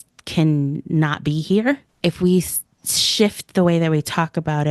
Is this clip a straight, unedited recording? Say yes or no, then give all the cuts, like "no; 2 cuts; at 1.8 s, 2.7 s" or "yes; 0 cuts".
no; 1 cut; at 1.9 s